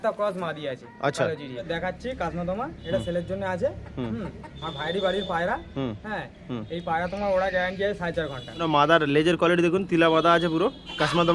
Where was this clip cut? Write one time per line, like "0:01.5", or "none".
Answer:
0:01.7
0:08.6